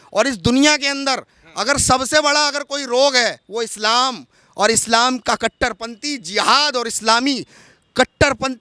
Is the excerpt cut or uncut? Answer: uncut